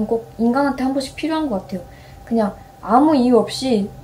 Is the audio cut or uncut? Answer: uncut